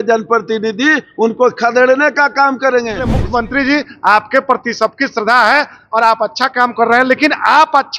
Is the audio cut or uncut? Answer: cut